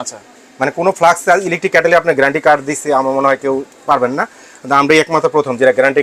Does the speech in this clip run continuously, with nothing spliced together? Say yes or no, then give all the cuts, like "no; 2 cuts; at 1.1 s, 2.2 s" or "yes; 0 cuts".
yes; 0 cuts